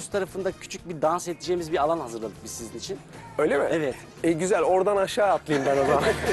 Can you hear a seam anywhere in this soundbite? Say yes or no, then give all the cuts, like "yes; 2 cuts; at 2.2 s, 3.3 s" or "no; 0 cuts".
no; 0 cuts